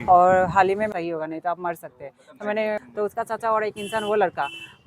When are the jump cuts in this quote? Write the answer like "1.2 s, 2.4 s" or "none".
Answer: 0.9 s, 2.8 s